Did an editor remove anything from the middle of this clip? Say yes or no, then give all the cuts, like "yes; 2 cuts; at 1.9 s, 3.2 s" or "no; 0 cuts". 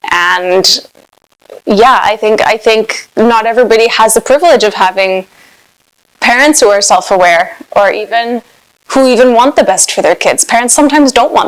no; 0 cuts